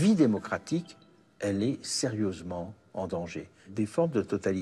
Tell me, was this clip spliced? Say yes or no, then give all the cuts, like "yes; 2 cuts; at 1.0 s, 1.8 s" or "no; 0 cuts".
yes; 2 cuts; at 1.0 s, 3.7 s